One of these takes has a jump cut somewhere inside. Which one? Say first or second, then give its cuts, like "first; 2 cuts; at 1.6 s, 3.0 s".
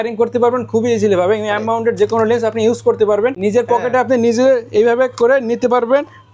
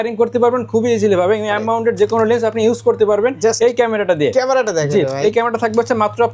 first; 1 cut; at 3.4 s